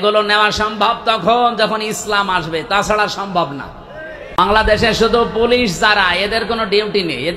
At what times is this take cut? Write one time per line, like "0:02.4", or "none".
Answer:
0:04.4